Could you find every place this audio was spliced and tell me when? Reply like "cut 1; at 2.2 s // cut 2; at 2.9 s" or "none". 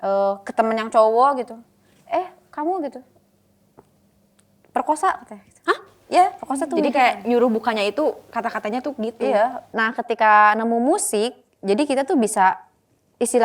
cut 1; at 9.7 s